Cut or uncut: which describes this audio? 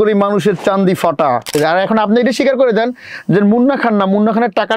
cut